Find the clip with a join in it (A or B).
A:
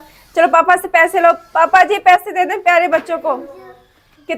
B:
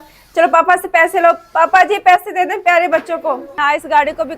B